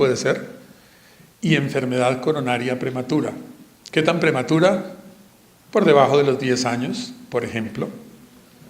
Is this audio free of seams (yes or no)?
no